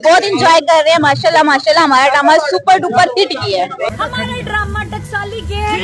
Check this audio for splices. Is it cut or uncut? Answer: cut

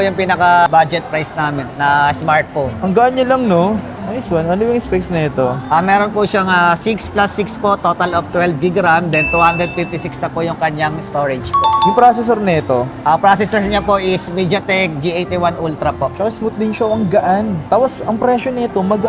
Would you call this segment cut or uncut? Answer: uncut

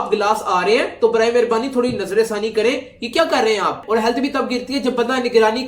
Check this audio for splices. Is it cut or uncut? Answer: cut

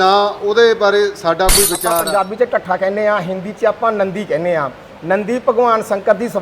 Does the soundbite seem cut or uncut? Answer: cut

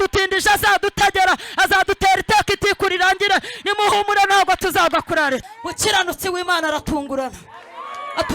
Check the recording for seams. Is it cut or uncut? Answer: cut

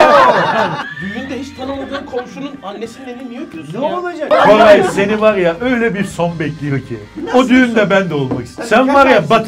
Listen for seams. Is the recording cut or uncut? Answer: cut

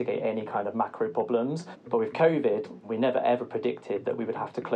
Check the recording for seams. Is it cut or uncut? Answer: cut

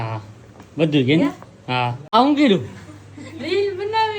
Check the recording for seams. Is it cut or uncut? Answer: cut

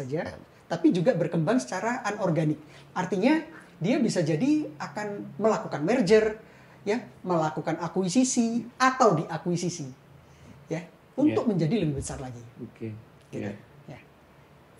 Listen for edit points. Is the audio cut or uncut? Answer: uncut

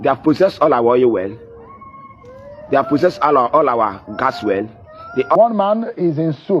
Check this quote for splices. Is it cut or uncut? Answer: cut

